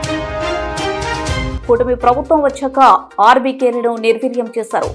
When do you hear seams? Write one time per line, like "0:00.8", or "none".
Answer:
0:01.5